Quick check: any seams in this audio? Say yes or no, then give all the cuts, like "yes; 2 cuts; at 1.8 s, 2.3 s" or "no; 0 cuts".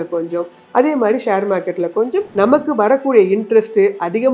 yes; 1 cut; at 2.3 s